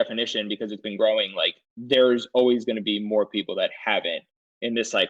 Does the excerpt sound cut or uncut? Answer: uncut